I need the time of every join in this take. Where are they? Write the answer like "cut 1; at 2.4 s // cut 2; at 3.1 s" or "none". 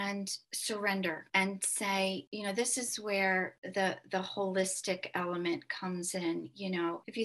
none